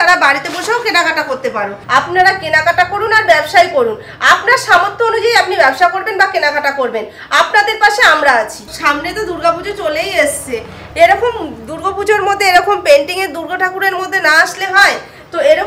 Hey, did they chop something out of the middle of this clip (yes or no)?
yes